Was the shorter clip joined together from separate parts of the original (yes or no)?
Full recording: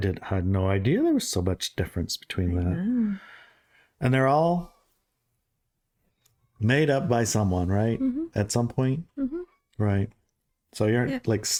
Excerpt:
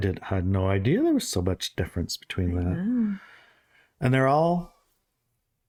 no